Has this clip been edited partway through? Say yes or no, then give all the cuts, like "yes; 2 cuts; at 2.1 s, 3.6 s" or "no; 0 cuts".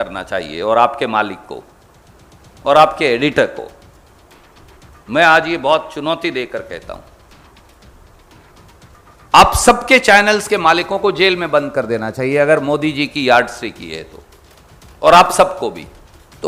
no; 0 cuts